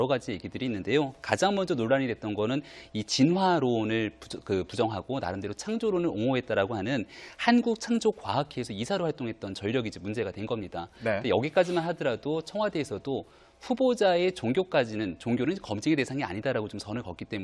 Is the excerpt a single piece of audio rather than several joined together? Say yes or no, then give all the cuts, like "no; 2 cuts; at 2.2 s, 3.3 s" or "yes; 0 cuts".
yes; 0 cuts